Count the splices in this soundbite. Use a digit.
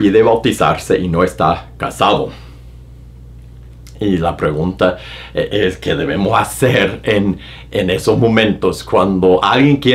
0